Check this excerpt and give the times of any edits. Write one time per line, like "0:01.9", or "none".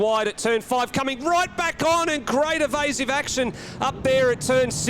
none

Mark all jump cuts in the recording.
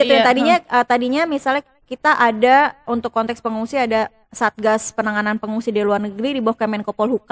none

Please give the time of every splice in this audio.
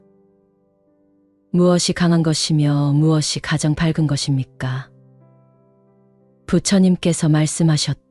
0:04.9
0:06.4

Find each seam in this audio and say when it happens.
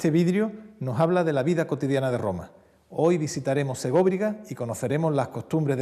0:01.2

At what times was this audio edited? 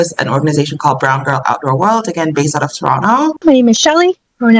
0:03.4

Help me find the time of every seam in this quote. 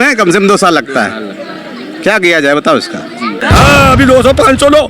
0:03.4

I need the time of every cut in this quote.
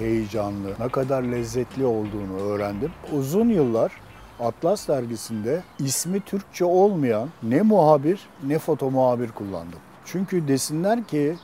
0:03.0

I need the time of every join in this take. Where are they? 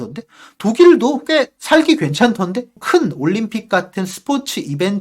0:02.8

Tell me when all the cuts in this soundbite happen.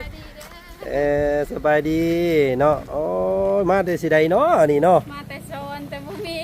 none

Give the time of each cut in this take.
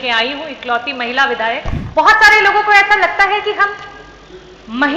0:01.8

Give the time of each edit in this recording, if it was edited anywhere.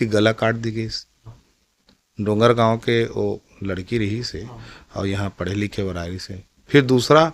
none

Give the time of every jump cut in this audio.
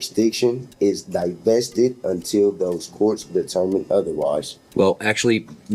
0:04.6

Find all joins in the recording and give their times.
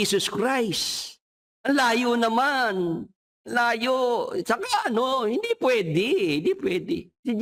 none

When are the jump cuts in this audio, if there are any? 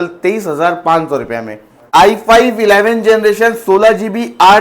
0:01.8

